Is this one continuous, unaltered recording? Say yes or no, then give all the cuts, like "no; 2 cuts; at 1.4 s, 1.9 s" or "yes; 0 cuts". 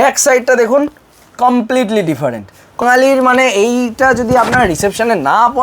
no; 1 cut; at 2.8 s